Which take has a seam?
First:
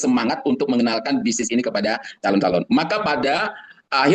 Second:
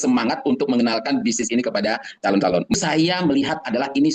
second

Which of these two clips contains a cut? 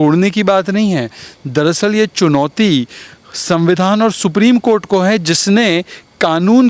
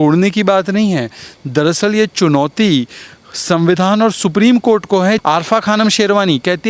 second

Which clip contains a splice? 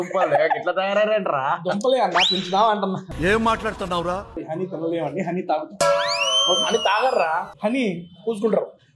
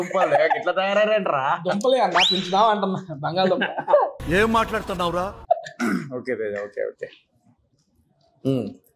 first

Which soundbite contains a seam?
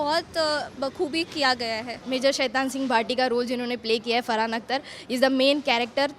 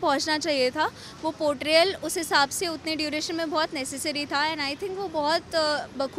first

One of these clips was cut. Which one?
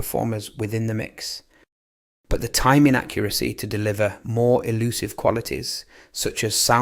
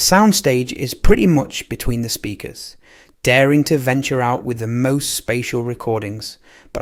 first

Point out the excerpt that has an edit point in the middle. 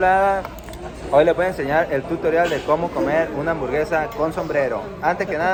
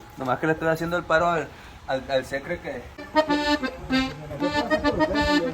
second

